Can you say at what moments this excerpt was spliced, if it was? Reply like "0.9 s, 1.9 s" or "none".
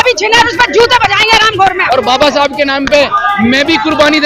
1.8 s